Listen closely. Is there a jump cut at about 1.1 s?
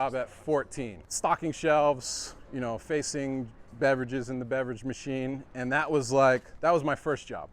no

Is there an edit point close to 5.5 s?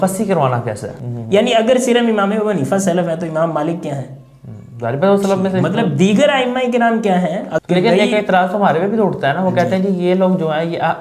no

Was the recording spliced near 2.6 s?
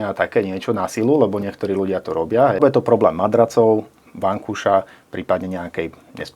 yes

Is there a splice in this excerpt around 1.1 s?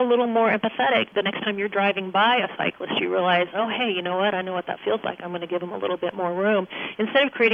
yes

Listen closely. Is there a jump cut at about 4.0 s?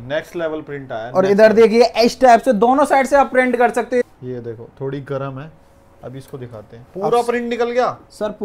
yes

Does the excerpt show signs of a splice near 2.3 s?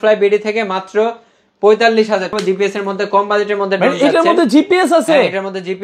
yes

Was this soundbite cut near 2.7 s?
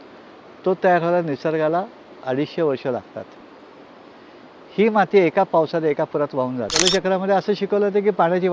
no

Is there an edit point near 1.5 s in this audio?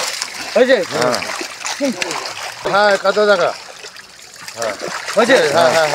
no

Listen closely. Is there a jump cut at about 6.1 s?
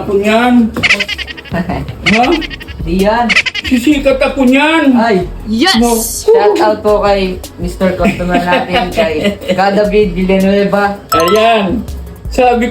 yes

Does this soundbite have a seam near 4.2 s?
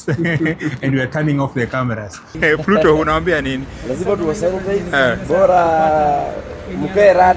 no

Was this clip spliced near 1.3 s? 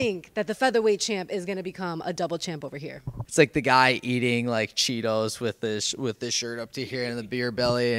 no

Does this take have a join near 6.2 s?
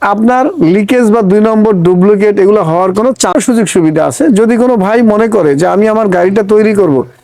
no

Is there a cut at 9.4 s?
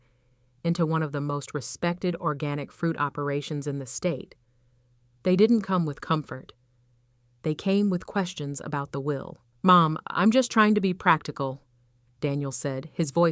yes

